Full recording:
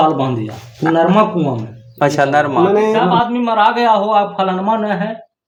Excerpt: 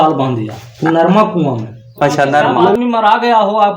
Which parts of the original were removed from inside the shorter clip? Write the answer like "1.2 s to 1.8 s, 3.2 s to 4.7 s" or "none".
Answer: 2.7 s to 3.3 s